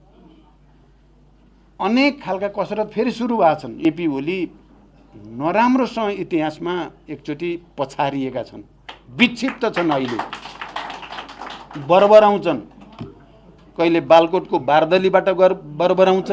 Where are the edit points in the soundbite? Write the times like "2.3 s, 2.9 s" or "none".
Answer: 3.7 s